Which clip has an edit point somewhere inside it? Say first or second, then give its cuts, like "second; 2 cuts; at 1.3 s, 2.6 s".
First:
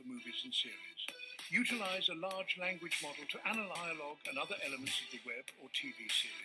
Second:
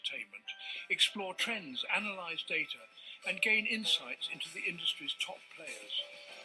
first; 1 cut; at 3.8 s